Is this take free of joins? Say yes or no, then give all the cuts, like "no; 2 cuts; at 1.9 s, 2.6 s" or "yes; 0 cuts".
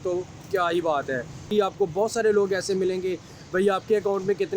no; 1 cut; at 1.4 s